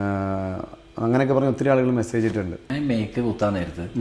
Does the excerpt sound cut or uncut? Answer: cut